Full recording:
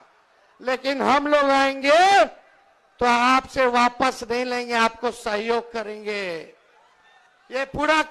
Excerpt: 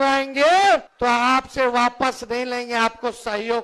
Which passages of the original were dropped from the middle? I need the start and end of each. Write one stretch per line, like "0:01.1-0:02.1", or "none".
0:02.4-0:02.9

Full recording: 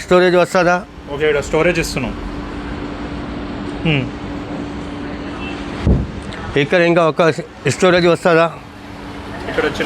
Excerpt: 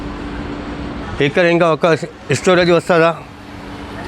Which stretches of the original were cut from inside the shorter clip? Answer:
0:03.3-0:06.4

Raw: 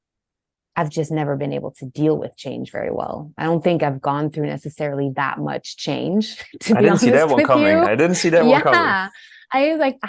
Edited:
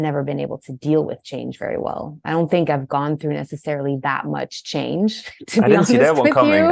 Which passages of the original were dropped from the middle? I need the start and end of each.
none

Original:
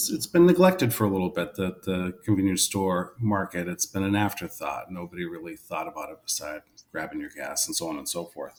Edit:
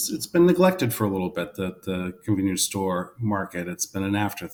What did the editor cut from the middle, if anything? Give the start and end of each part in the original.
none

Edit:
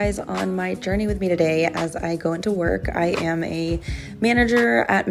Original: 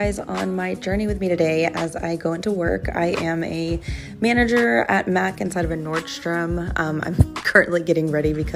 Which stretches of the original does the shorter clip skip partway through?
none

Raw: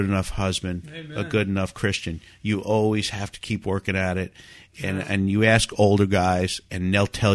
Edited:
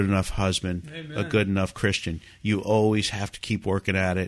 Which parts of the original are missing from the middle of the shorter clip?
none

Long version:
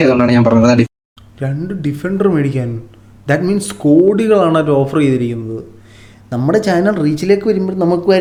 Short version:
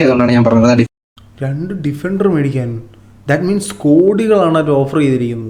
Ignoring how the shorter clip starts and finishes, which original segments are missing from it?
none

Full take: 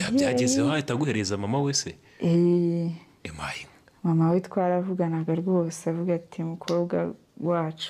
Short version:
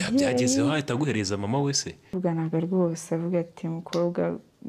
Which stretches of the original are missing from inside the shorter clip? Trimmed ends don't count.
0:02.1-0:04.9

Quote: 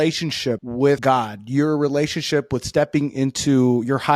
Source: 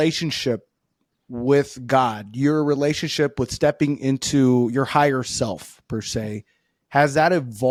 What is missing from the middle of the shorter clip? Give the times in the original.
0:00.9-0:01.8

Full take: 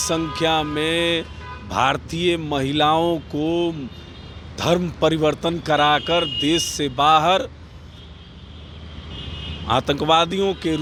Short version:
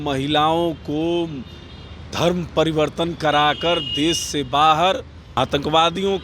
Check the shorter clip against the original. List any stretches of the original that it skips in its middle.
0:07.6-0:09.5

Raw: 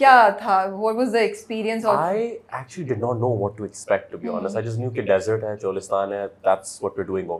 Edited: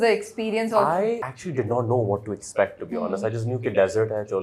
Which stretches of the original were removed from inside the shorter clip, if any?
0:02.4-0:02.6

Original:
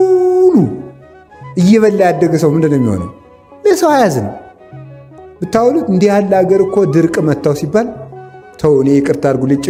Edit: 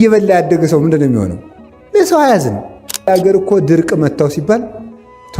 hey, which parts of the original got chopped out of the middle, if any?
0:04.7-0:06.3

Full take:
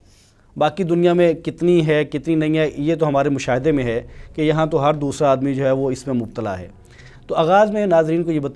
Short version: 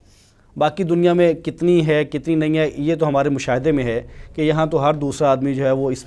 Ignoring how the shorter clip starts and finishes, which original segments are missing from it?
none

